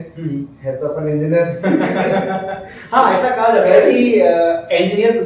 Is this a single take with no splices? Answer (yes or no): yes